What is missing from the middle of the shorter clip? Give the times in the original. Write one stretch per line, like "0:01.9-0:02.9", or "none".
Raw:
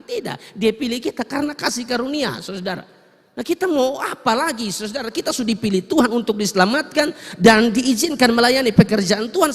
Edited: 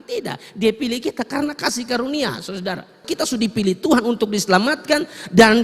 0:03.0-0:05.1